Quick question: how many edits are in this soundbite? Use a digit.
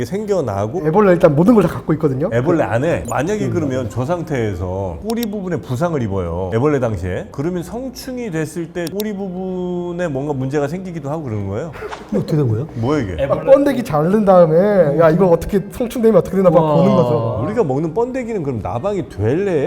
4